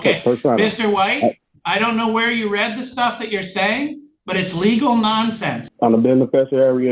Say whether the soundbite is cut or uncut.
cut